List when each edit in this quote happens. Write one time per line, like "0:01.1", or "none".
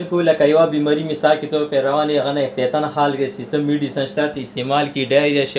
none